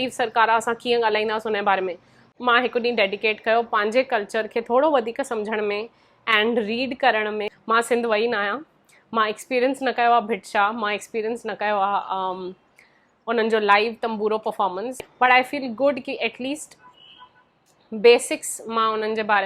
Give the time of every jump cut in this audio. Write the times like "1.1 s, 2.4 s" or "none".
2.3 s, 7.5 s, 14.9 s